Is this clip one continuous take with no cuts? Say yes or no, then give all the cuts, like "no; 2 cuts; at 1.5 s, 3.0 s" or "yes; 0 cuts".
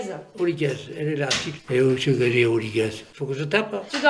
no; 1 cut; at 1.5 s